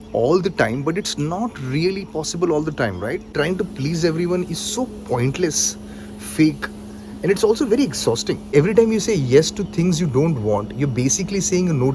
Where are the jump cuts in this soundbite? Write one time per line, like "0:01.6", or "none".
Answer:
0:03.3
0:08.4